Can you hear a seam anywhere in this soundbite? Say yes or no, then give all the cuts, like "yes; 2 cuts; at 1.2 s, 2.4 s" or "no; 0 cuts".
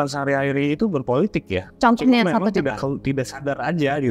yes; 1 cut; at 1.6 s